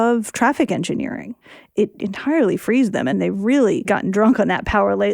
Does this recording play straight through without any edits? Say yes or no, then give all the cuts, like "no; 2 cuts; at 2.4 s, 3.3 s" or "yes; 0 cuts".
no; 3 cuts; at 1.8 s, 3.1 s, 3.9 s